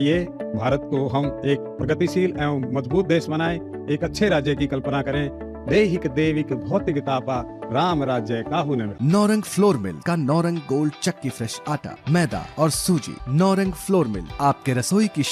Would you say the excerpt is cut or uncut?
uncut